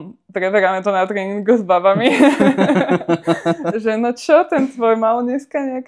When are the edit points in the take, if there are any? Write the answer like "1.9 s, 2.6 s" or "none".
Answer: none